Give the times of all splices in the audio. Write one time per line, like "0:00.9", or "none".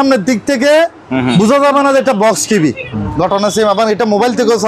0:02.9